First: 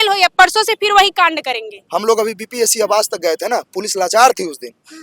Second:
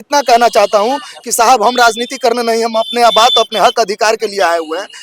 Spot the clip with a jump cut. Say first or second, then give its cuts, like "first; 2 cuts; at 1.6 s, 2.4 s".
first; 1 cut; at 1.8 s